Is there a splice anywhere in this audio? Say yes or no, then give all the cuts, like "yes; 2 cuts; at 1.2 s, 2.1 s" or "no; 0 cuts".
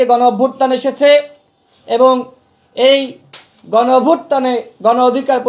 no; 0 cuts